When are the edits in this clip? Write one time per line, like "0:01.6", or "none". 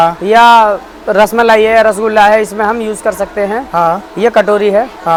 none